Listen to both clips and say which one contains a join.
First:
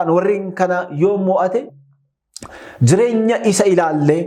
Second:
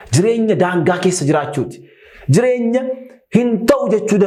first; 1 cut; at 1.7 s

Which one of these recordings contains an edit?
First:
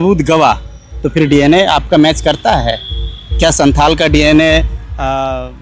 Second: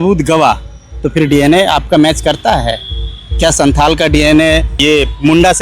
second; 1 cut; at 4.7 s

